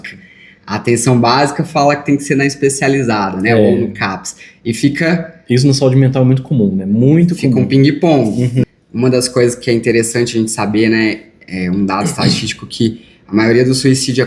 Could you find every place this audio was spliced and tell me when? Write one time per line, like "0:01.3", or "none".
0:08.6

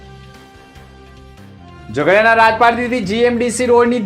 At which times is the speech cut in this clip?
0:01.1

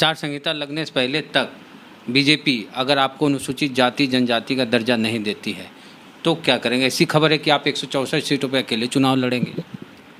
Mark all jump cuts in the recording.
none

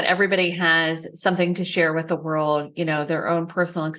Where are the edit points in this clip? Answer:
none

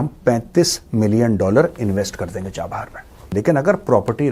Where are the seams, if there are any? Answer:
0:03.3

